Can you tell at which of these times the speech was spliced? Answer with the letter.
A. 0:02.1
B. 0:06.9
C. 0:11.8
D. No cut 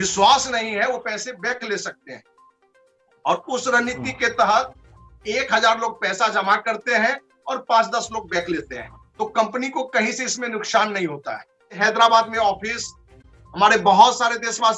C